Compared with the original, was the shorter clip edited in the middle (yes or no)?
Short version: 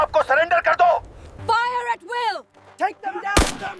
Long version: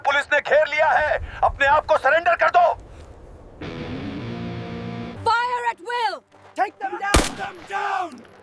yes